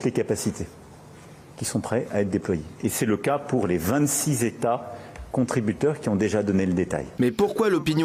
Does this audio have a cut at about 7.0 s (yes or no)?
yes